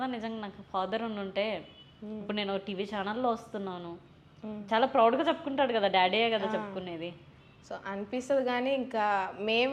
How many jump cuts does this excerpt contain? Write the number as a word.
zero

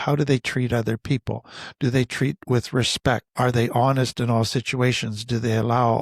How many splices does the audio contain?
one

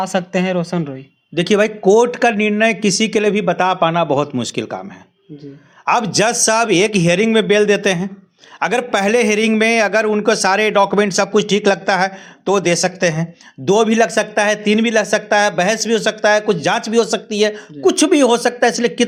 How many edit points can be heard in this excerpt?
zero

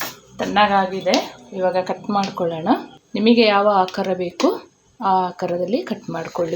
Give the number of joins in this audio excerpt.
one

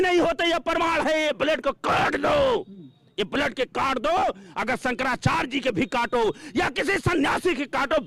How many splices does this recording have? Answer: zero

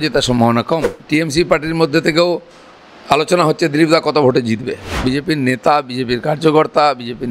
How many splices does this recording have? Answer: two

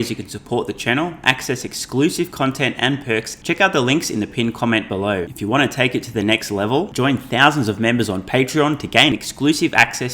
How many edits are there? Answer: two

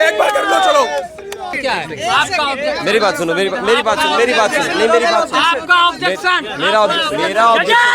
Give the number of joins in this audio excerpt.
one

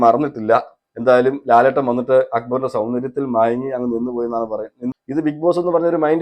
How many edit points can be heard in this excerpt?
one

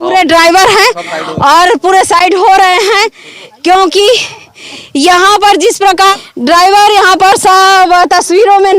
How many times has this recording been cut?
one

